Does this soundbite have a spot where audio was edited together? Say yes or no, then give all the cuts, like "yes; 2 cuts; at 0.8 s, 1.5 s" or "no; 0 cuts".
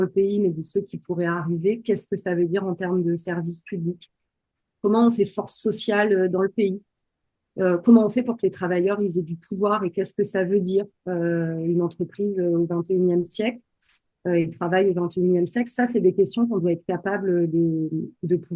no; 0 cuts